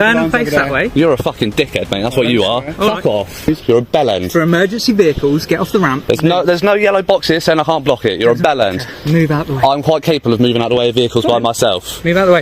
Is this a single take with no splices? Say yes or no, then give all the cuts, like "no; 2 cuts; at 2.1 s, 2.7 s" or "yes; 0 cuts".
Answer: no; 1 cut; at 3.5 s